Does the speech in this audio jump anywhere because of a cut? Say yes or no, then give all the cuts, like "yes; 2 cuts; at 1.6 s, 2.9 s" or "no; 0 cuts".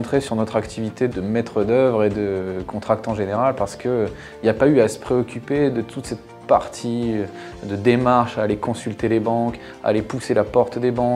no; 0 cuts